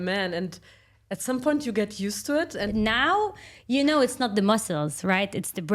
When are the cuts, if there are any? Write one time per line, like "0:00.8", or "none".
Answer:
0:02.7